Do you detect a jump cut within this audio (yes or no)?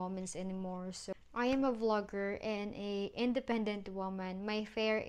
yes